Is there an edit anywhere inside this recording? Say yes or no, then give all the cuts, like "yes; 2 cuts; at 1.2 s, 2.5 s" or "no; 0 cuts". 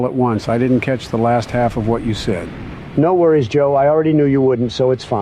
no; 0 cuts